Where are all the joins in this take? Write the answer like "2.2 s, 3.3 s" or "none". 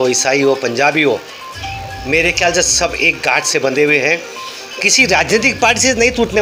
none